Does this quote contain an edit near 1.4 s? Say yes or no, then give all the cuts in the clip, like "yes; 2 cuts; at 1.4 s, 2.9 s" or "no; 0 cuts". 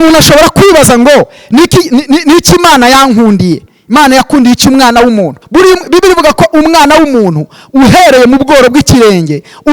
no; 1 cut; at 5.4 s